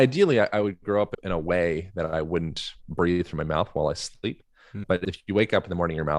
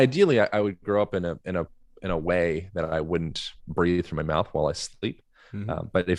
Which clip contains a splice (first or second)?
first